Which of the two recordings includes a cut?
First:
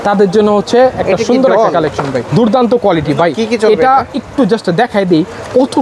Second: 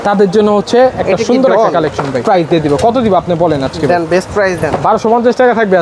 first; 1 cut; at 2.2 s

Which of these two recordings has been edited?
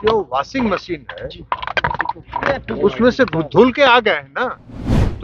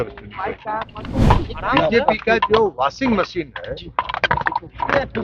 second; 1 cut; at 1.0 s

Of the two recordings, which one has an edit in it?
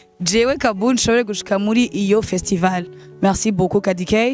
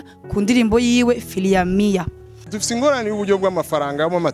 second; 1 cut; at 2.6 s

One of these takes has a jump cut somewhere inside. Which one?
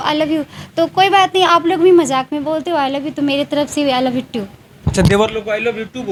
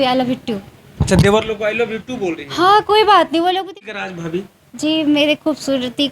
second; 1 cut; at 3.8 s

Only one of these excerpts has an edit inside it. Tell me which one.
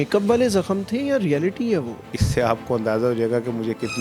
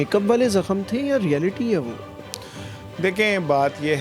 first; 1 cut; at 2.2 s

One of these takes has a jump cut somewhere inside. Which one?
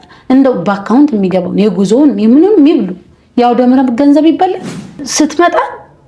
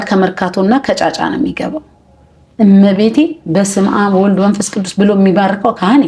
first; 1 cut; at 5.0 s

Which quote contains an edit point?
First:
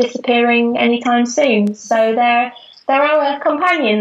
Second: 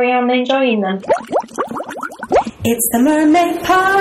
second; 1 cut; at 1.0 s

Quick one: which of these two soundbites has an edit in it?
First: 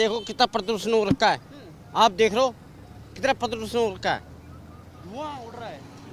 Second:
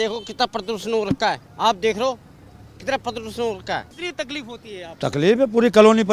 second; 2 cuts; at 1.5 s, 4.0 s

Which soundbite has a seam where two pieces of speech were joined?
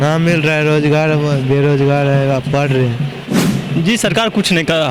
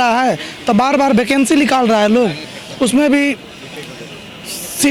first; 1 cut; at 3.4 s

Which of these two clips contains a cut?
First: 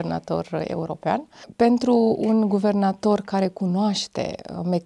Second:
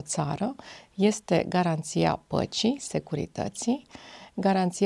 first; 1 cut; at 1.4 s

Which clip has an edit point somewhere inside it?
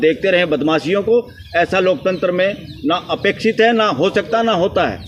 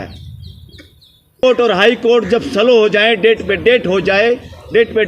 second; 1 cut; at 1.4 s

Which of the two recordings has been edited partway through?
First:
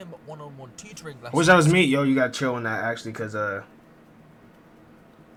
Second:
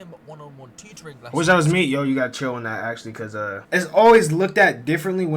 second; 1 cut; at 3.6 s

